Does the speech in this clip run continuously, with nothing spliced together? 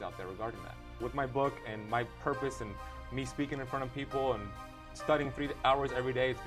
no; 1 cut; at 1.0 s

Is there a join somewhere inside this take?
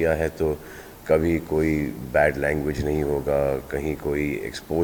no; 0 cuts

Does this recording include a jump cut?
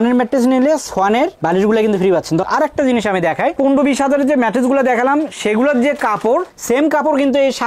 yes; 1 cut; at 2.5 s

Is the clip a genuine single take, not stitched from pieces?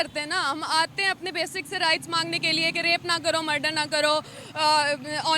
yes; 0 cuts

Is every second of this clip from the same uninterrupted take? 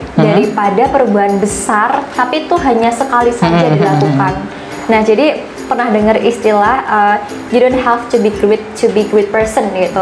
yes; 0 cuts

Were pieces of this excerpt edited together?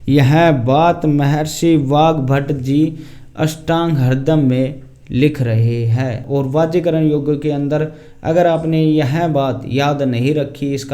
yes; 1 cut; at 6.2 s

